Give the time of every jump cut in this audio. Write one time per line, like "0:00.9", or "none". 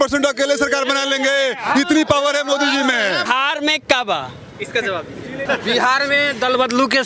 0:03.2
0:05.4